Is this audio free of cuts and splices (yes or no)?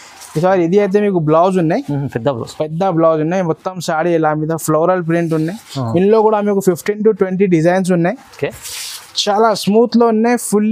yes